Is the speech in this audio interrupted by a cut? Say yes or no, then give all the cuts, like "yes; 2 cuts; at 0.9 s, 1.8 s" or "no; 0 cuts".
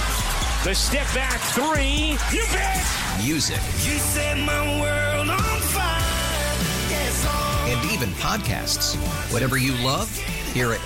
no; 0 cuts